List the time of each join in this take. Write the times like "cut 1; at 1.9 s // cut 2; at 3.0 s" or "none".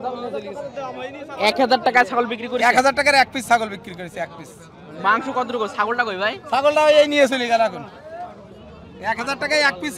none